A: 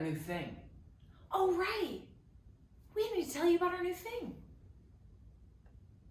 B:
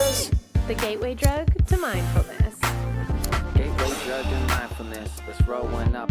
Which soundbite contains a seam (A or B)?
B